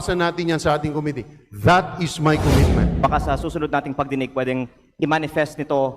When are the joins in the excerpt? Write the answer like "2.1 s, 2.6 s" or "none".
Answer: 2.9 s